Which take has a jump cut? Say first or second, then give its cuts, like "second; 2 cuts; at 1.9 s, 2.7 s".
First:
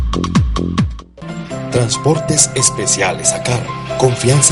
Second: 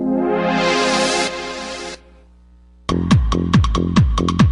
first; 1 cut; at 0.9 s